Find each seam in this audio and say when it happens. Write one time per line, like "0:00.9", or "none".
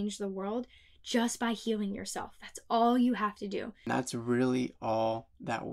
0:03.9